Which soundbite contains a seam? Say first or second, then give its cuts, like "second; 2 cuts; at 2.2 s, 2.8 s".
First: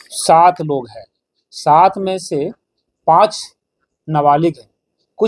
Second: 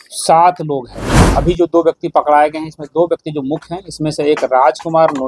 second; 1 cut; at 1.3 s